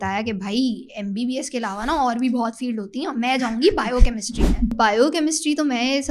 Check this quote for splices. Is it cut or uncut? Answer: cut